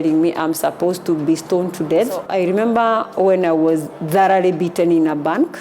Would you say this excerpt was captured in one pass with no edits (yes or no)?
no